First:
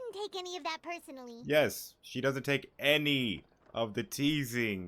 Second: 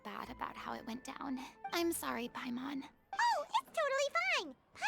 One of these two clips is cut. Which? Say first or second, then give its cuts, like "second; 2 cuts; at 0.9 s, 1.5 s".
second; 1 cut; at 3.0 s